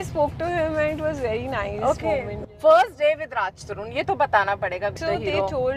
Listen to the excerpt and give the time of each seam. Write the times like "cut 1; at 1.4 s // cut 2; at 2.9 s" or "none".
cut 1; at 2.4 s // cut 2; at 5.0 s

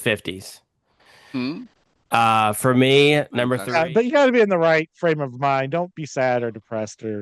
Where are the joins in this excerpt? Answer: cut 1; at 3.6 s

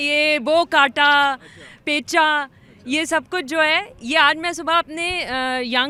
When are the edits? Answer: none

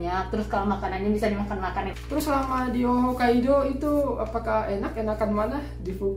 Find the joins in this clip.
cut 1; at 1.9 s

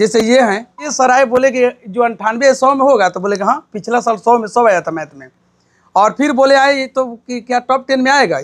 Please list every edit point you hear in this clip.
cut 1; at 0.9 s

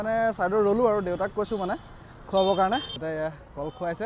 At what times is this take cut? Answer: cut 1; at 2.9 s

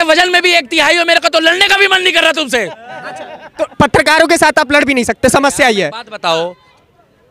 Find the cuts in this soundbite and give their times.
none

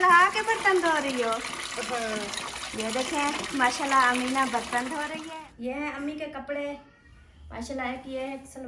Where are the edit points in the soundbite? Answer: cut 1; at 5.2 s

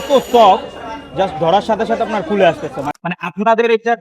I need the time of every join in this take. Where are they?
cut 1; at 2.9 s

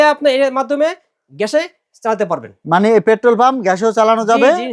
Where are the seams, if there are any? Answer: none

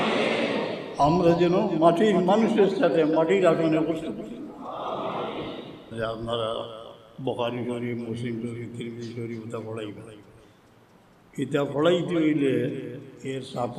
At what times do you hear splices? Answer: cut 1; at 5.9 s

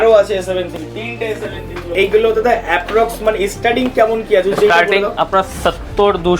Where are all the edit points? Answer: cut 1; at 1.9 s // cut 2; at 5.5 s

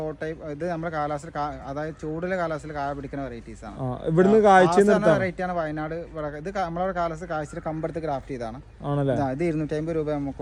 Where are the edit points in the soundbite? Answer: none

